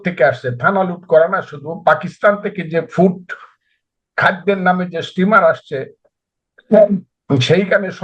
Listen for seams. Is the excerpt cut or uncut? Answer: uncut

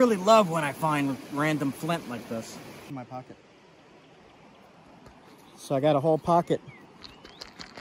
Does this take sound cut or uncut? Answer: cut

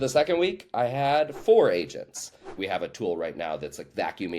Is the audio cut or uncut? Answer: cut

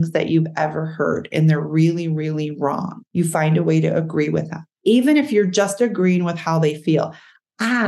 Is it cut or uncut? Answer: cut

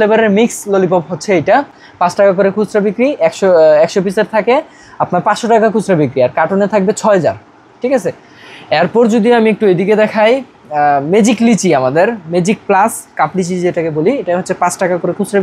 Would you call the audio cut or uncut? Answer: uncut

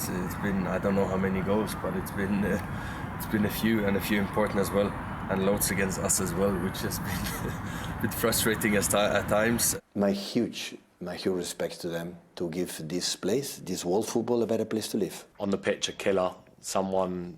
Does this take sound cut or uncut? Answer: cut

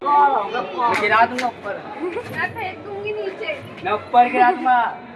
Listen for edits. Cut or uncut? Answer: uncut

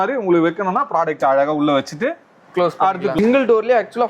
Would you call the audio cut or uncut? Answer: cut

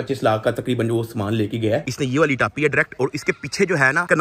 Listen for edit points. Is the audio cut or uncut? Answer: cut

